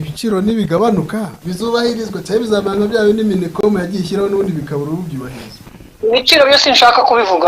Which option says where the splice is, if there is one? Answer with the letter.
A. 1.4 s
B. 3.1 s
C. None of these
A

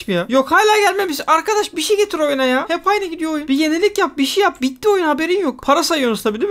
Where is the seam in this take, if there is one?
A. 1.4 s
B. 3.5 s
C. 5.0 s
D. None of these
D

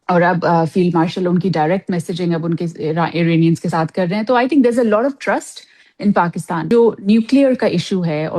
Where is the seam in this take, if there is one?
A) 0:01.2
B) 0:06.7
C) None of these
B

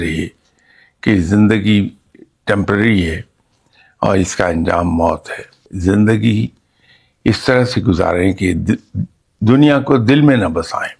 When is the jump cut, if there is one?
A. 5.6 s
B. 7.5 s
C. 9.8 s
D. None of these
A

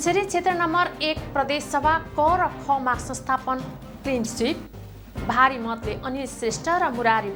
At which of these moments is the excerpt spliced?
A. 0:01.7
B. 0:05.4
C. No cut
C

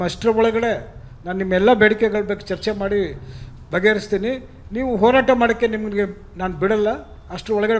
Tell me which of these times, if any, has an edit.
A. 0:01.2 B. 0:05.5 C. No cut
C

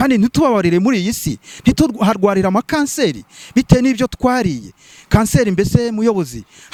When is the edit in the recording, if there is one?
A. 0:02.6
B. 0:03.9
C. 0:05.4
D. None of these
D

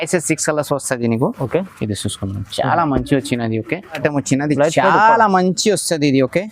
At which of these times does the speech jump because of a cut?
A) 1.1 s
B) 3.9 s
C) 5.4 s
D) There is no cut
B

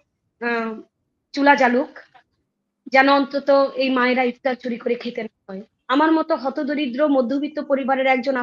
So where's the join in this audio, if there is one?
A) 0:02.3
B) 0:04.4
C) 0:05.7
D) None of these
C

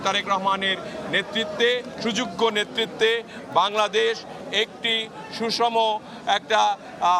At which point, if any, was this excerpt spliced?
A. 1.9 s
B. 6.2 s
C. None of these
C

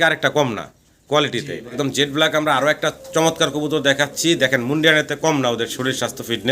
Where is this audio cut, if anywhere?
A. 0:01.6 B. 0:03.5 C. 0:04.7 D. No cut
A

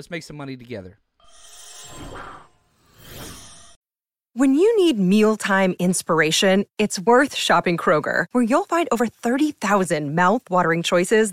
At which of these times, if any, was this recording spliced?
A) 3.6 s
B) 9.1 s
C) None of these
A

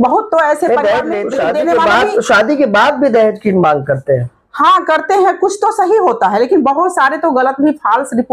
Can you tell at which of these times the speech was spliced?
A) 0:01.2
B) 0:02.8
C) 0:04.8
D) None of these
A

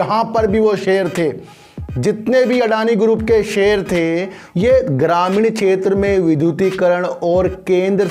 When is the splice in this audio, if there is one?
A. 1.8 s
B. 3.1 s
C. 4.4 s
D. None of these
C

